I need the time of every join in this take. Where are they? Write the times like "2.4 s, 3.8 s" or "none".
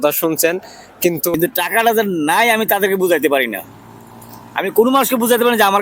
1.3 s